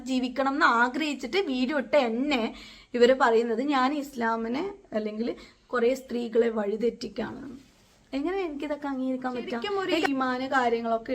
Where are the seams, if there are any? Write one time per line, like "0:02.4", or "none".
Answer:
0:10.1